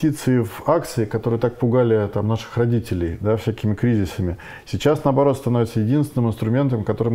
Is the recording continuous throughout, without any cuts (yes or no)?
yes